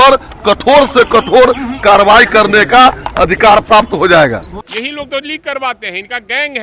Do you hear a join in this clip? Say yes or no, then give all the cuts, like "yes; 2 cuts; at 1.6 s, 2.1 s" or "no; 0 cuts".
yes; 1 cut; at 4.5 s